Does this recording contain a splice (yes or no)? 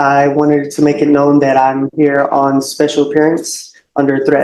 no